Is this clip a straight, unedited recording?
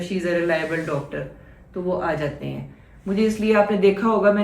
yes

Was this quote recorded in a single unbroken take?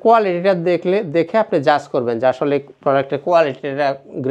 yes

